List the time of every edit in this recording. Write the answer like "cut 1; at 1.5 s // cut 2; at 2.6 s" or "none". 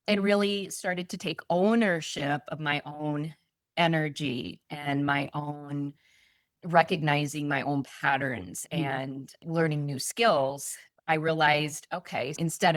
none